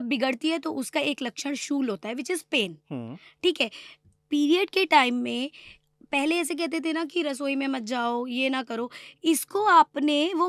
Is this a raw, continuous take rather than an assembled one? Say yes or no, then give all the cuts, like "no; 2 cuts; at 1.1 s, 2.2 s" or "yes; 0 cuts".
yes; 0 cuts